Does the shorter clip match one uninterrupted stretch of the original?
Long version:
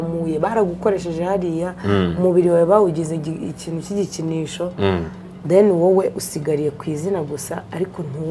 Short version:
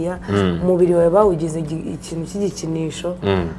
yes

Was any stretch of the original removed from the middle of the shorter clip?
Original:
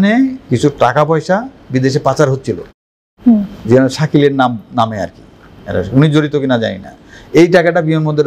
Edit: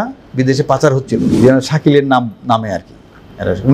yes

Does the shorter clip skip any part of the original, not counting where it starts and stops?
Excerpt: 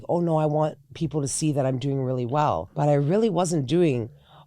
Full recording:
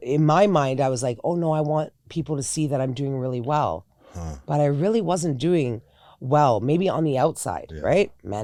yes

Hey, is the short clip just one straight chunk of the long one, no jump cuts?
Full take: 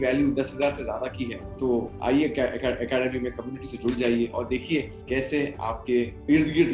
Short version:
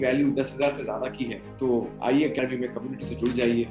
no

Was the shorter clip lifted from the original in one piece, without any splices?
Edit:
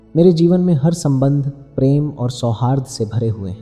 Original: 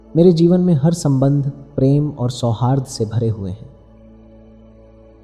yes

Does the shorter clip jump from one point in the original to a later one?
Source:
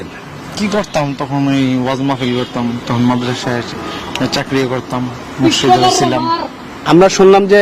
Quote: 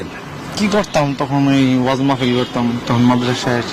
no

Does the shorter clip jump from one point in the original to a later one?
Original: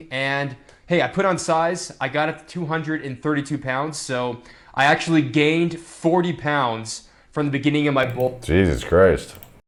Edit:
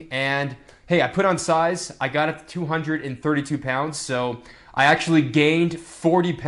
no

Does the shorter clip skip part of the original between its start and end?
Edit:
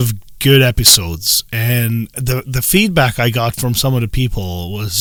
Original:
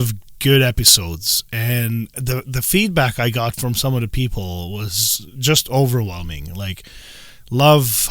no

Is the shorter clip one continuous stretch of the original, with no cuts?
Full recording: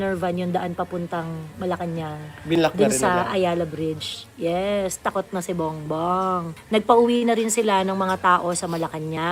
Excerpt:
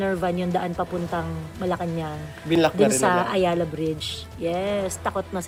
yes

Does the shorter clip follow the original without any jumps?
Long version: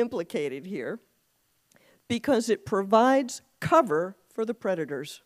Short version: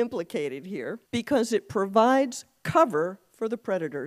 no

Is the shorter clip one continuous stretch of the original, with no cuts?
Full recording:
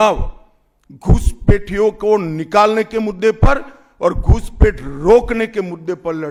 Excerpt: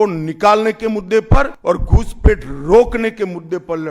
no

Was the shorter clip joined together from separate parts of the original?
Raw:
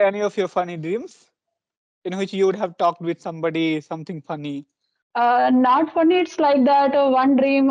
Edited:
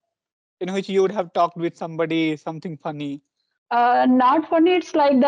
no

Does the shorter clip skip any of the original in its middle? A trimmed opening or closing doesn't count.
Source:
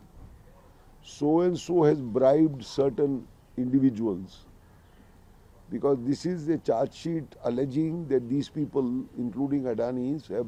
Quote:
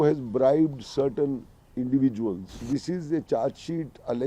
yes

